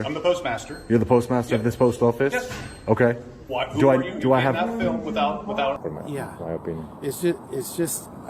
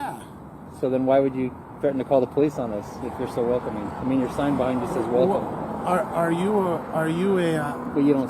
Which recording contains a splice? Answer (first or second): first